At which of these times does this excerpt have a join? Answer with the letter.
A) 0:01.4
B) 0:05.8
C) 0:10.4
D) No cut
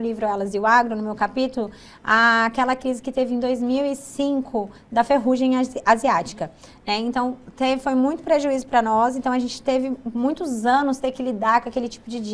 D